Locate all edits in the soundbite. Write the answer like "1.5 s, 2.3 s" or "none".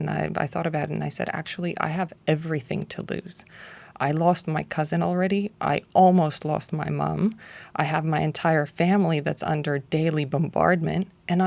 none